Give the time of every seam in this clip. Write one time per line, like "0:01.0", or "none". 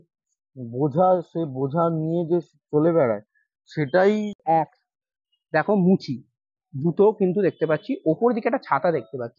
0:04.4